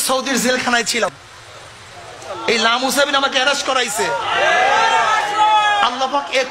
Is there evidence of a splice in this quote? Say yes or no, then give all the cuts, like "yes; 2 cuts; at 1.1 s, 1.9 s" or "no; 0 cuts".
yes; 1 cut; at 1.0 s